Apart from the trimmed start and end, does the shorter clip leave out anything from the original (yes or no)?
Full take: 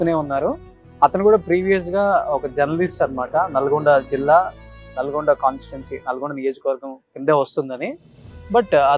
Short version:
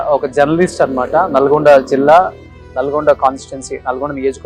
no